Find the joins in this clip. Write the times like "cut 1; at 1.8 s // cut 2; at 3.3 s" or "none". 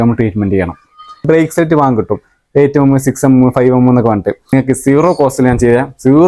cut 1; at 1.2 s // cut 2; at 4.5 s